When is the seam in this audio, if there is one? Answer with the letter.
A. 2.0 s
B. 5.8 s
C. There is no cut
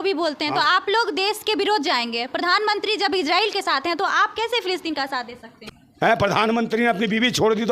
B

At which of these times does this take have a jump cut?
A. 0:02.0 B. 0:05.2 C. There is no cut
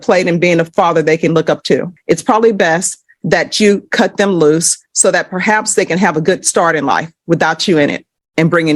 A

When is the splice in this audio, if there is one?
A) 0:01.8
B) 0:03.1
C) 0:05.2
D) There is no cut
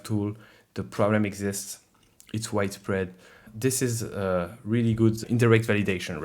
C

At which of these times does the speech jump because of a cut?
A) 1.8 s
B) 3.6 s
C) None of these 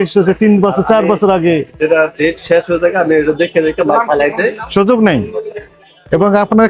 C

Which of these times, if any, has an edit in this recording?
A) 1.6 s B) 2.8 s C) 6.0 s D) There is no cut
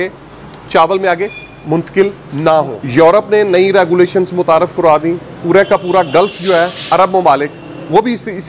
B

